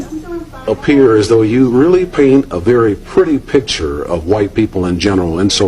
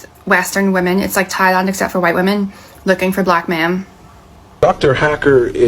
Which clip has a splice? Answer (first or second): second